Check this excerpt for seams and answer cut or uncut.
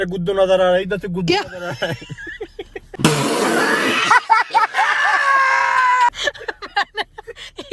uncut